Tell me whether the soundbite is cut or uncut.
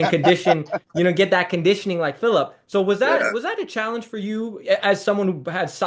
uncut